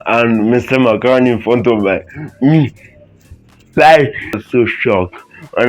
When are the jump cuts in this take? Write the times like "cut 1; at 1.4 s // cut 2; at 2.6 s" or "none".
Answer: cut 1; at 4.4 s